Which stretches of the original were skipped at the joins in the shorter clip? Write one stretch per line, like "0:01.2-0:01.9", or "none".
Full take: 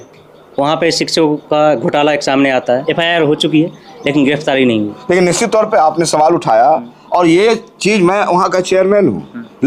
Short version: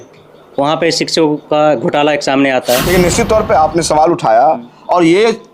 0:02.8-0:05.0